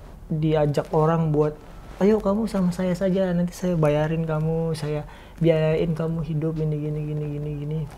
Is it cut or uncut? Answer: uncut